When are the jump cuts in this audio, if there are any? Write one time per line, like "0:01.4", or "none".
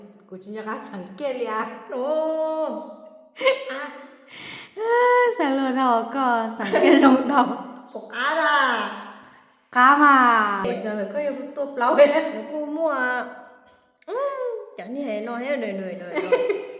0:10.7